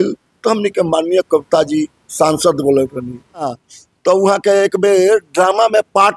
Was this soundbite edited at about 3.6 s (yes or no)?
yes